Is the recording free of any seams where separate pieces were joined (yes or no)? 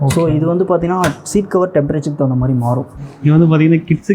no